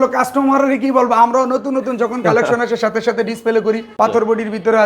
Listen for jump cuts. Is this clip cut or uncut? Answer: cut